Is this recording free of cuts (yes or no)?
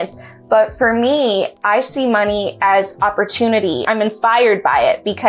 no